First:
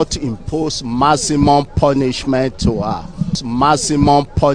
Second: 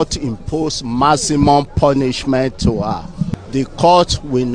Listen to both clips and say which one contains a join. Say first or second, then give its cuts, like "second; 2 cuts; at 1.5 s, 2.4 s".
first; 1 cut; at 3.4 s